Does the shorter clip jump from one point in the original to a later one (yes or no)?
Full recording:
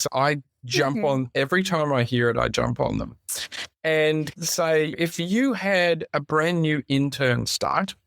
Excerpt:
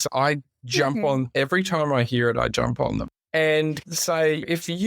yes